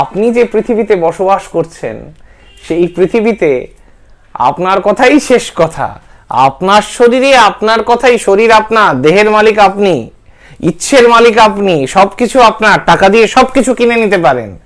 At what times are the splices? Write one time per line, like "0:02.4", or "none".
none